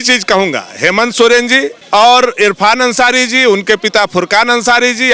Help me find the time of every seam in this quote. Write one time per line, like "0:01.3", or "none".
0:01.8